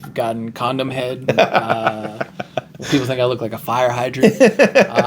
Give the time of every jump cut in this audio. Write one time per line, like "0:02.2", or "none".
0:01.2
0:02.8
0:04.2